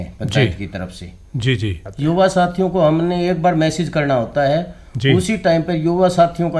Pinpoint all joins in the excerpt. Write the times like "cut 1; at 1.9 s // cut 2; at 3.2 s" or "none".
cut 1; at 1.8 s